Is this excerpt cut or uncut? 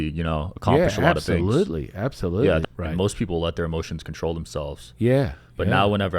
cut